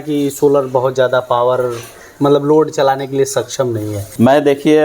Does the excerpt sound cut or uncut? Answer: uncut